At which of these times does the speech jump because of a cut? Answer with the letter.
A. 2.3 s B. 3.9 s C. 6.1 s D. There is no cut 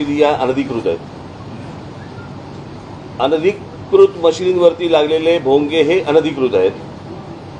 D